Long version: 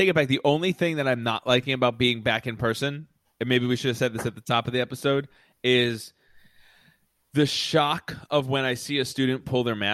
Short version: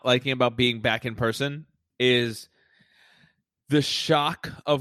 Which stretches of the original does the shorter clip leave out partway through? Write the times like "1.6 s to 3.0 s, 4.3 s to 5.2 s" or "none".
3.2 s to 5.4 s

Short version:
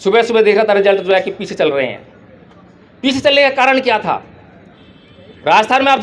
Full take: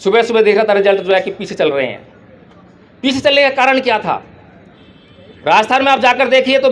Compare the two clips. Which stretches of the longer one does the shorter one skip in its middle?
none

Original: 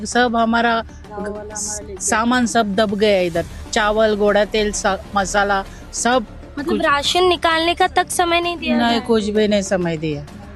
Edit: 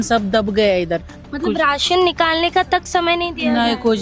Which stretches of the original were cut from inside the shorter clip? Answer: 3.6 s to 6.4 s

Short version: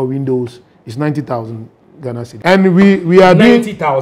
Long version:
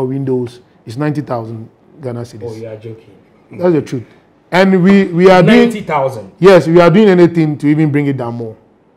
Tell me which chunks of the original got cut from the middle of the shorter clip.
2.3 s to 4.3 s

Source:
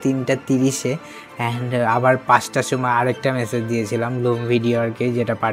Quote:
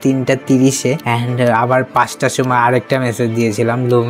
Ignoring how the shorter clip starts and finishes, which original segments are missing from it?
1.0 s to 1.4 s

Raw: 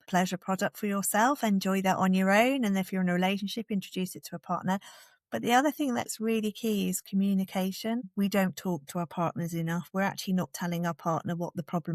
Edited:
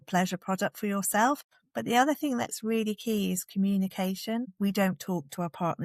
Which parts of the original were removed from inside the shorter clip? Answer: 1.4 s to 5.0 s

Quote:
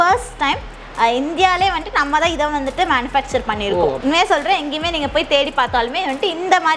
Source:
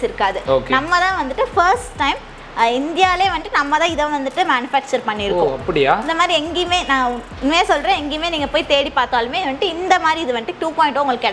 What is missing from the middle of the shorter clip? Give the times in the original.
5.6 s to 7.4 s

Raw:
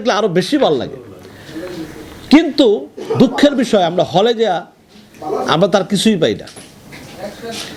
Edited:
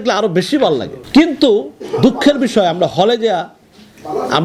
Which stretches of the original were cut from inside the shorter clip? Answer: 0.9 s to 2.1 s

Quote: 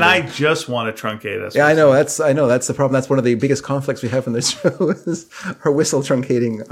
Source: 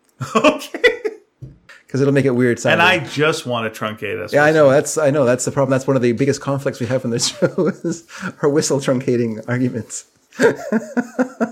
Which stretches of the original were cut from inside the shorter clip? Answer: none

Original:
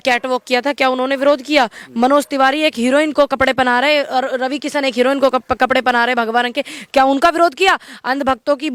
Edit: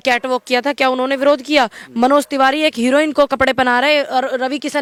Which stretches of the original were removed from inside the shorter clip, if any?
none

